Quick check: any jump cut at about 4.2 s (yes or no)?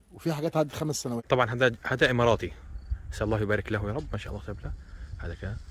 no